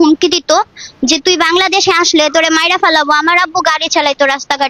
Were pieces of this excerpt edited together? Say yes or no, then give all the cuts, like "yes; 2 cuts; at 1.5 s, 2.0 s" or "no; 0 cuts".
no; 0 cuts